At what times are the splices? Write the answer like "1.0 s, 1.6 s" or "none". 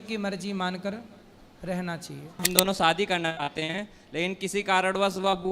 2.4 s